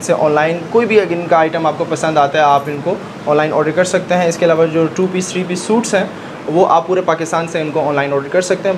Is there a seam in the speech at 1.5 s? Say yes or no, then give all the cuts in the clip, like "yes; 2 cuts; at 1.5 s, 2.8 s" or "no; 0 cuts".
no; 0 cuts